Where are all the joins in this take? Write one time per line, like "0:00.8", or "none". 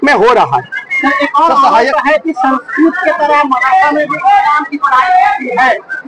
none